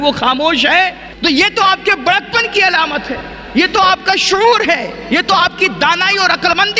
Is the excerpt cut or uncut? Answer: uncut